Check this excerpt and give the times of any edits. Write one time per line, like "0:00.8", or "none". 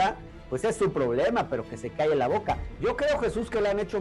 0:02.7